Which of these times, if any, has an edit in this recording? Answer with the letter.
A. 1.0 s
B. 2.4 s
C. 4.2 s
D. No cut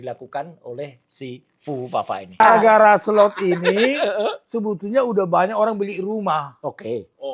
B